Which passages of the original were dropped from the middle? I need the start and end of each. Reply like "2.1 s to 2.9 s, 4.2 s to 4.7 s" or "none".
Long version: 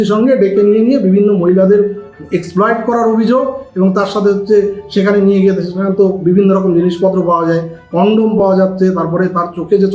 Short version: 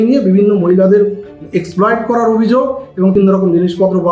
3.9 s to 6.4 s